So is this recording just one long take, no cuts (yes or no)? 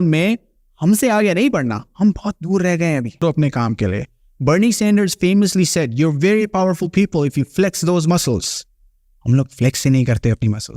no